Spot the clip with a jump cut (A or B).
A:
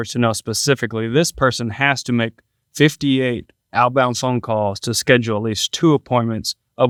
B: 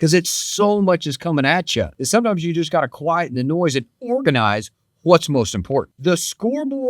B